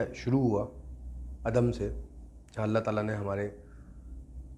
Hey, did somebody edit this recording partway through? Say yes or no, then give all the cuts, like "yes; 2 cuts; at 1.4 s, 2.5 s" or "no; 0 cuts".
no; 0 cuts